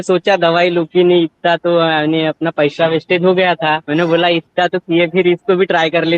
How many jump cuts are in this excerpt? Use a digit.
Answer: 1